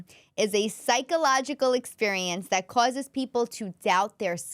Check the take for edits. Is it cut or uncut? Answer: uncut